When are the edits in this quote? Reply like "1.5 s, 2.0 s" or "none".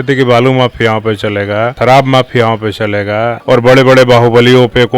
1.7 s, 3.3 s